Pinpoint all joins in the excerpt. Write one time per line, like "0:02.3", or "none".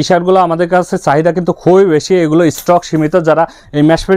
none

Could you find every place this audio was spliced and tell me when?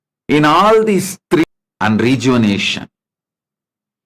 0:01.4

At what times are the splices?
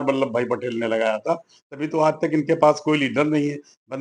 none

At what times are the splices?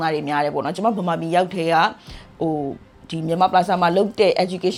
none

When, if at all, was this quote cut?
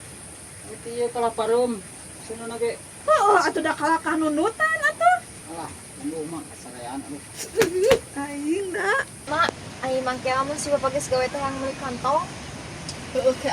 0:09.3

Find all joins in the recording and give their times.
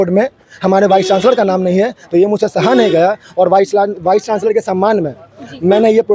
none

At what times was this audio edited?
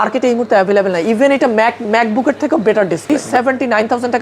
0:03.0

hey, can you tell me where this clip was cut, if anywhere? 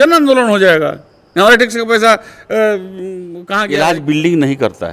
0:03.4

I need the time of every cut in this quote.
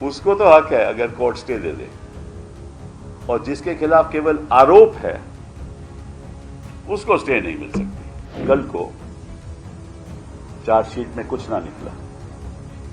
0:08.3
0:08.9
0:10.6
0:11.9

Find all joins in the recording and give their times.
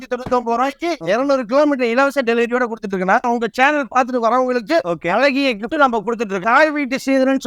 0:01.0
0:03.3
0:06.4

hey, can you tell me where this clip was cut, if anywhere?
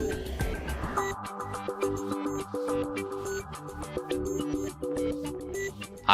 0:00.9

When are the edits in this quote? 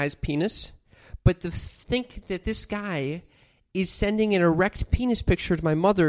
none

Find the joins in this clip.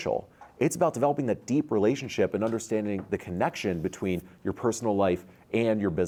none

